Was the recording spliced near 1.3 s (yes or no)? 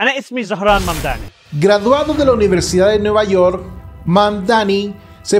yes